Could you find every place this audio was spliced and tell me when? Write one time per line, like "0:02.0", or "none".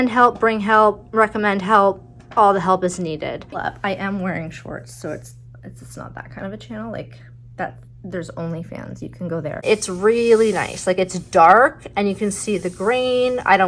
0:03.6
0:09.6